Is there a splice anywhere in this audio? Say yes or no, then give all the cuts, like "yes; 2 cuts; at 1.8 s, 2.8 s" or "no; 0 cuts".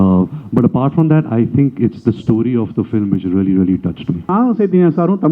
yes; 1 cut; at 4.3 s